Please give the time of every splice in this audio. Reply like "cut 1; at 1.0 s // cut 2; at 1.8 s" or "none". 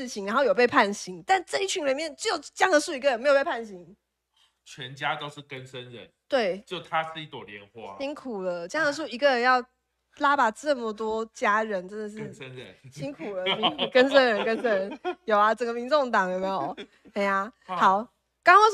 none